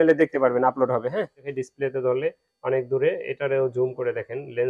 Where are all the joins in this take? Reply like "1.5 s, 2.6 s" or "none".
1.5 s